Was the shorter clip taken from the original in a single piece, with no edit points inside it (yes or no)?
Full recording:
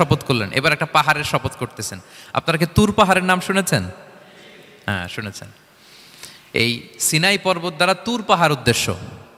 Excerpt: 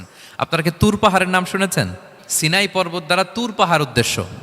no